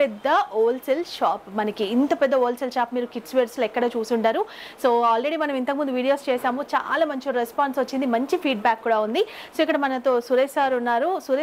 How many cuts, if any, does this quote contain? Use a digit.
0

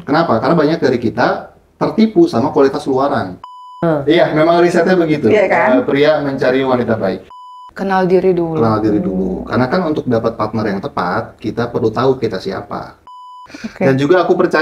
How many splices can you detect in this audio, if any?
3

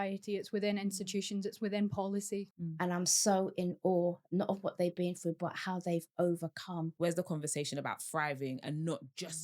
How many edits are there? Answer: 2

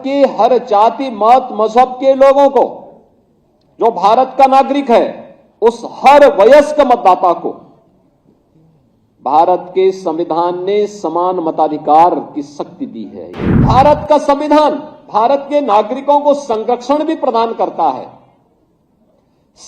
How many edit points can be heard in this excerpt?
1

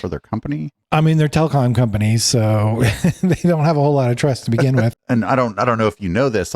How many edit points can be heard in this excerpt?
1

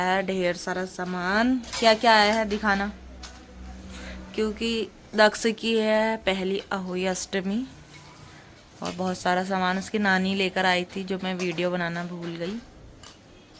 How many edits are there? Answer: 0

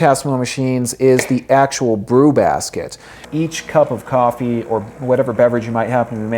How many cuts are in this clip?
1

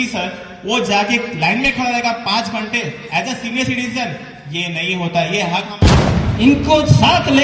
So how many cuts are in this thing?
1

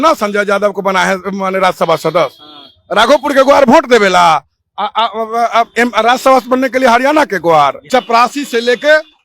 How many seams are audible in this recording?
1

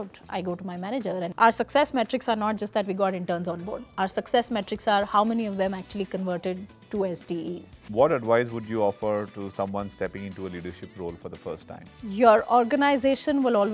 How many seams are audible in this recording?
2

